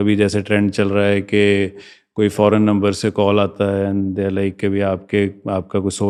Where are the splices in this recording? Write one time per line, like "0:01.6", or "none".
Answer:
none